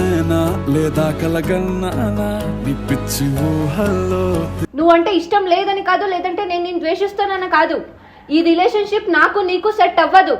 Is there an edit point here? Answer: yes; 1 cut; at 4.6 s

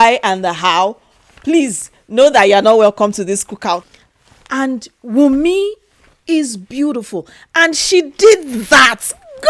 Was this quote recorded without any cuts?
no; 1 cut; at 3.9 s

